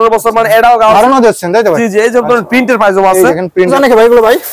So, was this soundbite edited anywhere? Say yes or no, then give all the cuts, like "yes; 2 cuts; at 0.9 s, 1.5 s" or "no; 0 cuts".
yes; 2 cuts; at 0.9 s, 3.7 s